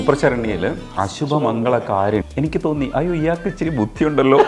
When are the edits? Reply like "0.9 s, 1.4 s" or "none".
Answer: 0.8 s, 2.2 s